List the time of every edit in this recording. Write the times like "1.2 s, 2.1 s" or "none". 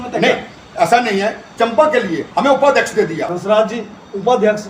3.3 s